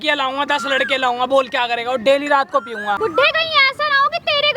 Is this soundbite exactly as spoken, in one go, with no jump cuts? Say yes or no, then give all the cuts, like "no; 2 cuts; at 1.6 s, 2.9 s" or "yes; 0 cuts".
no; 1 cut; at 3.0 s